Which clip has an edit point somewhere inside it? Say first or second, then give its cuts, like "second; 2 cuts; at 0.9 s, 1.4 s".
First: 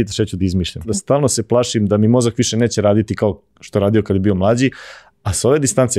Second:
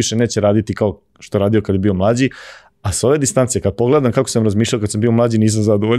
first; 1 cut; at 0.9 s